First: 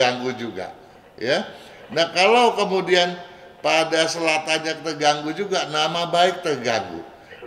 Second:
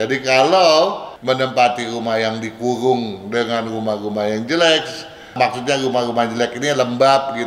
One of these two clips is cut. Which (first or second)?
second